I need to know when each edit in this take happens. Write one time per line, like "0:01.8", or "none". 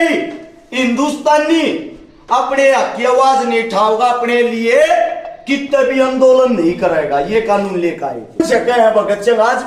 0:08.4